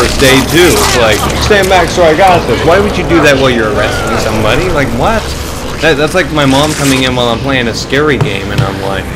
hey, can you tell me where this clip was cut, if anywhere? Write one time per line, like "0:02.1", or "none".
none